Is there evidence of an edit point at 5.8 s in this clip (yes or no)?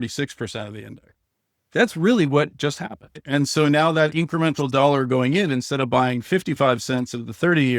no